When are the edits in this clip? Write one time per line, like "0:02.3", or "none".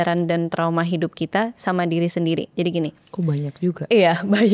none

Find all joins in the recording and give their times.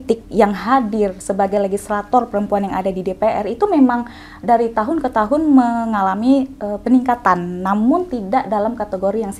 none

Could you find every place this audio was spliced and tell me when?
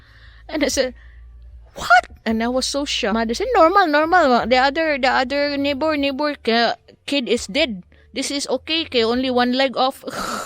0:03.1

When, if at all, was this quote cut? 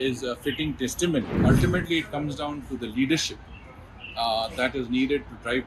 0:01.3

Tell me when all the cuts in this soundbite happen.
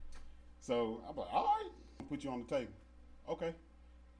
0:02.1

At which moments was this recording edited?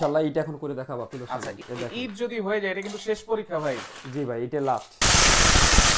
0:01.6
0:05.0

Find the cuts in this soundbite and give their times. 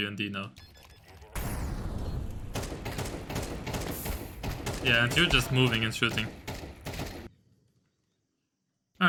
none

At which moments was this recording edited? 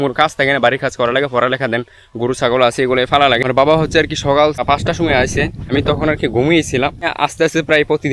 0:03.5
0:04.6
0:05.7
0:07.1

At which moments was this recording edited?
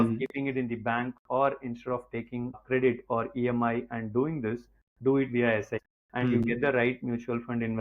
0:02.6
0:05.8

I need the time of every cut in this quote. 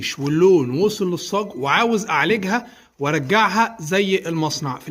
none

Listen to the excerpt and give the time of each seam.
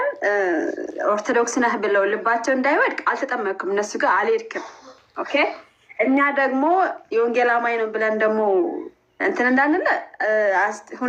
none

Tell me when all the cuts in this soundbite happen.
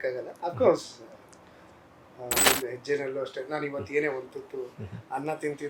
0:02.4

